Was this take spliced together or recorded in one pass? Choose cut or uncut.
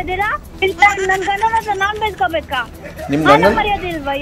uncut